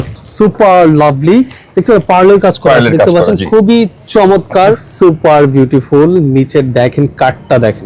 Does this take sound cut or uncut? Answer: cut